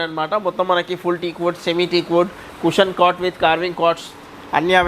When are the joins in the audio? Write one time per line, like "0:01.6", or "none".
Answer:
none